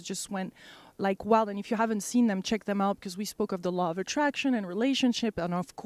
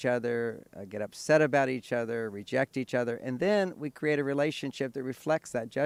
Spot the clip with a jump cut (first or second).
first